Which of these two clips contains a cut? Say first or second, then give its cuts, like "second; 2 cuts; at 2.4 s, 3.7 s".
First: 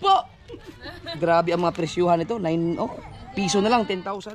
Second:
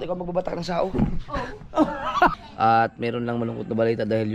second; 1 cut; at 2.3 s